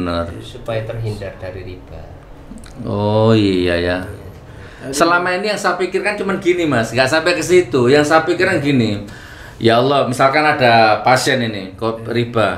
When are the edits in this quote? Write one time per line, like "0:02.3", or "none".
none